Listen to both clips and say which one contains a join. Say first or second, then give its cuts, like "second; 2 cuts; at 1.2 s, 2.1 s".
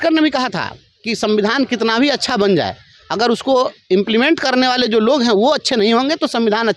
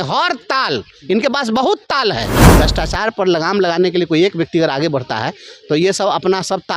second; 1 cut; at 2.4 s